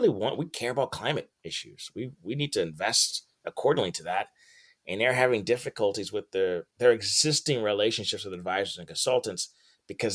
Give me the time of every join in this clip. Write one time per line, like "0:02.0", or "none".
none